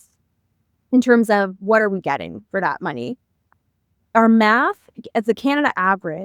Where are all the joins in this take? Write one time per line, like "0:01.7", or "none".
0:03.4